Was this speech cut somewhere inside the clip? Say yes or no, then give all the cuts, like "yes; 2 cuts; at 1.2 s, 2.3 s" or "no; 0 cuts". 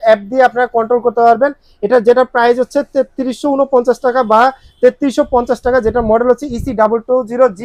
no; 0 cuts